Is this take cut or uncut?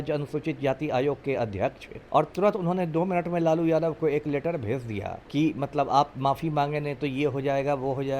cut